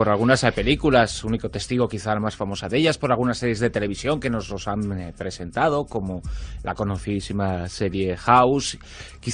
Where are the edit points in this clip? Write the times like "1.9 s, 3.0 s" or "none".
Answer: none